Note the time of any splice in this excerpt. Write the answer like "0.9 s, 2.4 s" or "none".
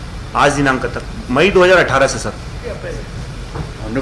2.8 s